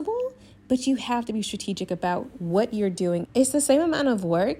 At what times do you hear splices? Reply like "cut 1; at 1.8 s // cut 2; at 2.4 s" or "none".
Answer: cut 1; at 3.3 s

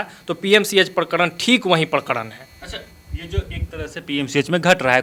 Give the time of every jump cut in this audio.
none

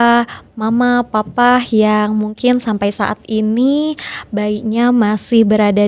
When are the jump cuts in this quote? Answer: none

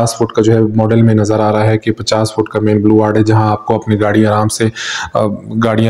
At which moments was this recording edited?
none

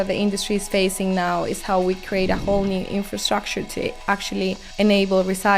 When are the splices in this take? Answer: cut 1; at 4.6 s

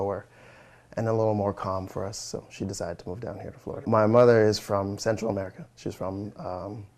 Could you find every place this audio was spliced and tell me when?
cut 1; at 3.8 s

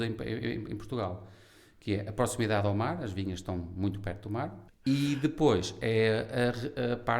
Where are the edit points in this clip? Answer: cut 1; at 4.6 s

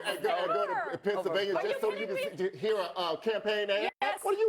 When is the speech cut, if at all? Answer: none

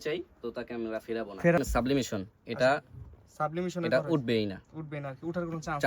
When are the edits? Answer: cut 1; at 1.6 s

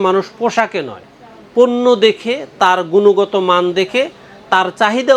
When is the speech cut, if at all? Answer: none

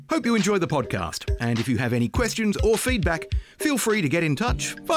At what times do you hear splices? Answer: none

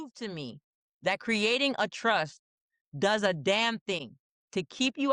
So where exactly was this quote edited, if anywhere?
none

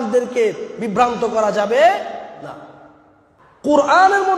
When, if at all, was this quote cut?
cut 1; at 3.4 s

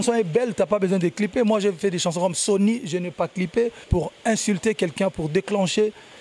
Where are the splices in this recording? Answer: cut 1; at 3.8 s

